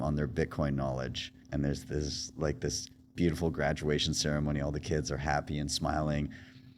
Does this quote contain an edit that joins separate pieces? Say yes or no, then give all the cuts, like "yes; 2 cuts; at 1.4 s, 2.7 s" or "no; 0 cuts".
yes; 1 cut; at 1.4 s